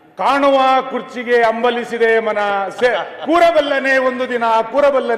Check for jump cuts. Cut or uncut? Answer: uncut